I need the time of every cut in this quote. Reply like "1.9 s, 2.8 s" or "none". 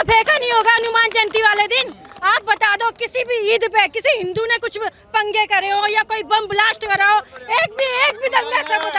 none